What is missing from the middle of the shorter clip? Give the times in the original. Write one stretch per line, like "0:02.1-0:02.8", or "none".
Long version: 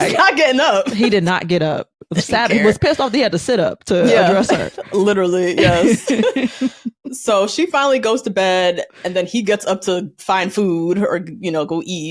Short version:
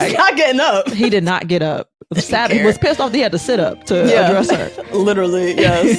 none